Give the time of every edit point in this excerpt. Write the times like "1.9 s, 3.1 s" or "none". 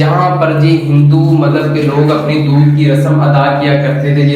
none